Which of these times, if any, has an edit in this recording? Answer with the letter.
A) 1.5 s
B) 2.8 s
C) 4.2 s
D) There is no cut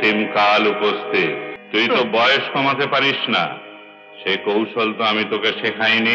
A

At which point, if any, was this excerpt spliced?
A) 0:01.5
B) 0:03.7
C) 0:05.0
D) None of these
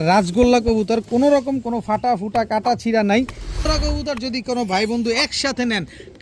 B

